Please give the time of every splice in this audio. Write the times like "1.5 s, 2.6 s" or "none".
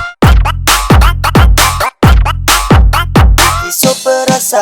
3.5 s